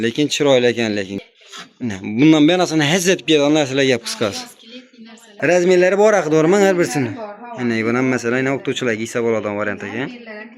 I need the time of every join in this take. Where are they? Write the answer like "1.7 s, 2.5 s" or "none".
1.1 s, 5.2 s